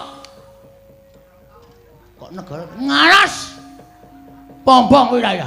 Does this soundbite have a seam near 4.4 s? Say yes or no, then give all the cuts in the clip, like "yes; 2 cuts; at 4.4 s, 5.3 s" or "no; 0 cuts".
no; 1 cut; at 2.5 s